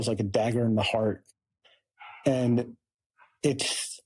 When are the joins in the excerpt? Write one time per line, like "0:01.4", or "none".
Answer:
none